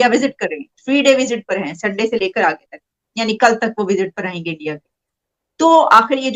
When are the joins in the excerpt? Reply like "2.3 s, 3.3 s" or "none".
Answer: none

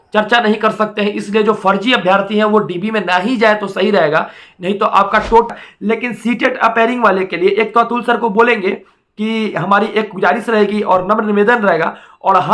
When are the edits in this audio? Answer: 5.5 s

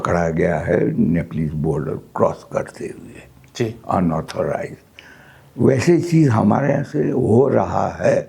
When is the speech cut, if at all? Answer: none

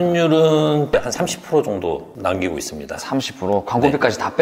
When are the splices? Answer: 1.0 s

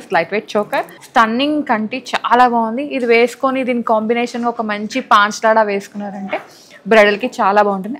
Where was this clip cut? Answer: 1.0 s

